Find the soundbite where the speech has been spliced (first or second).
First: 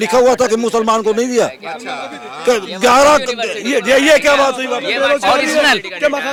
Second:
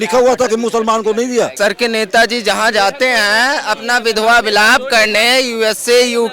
second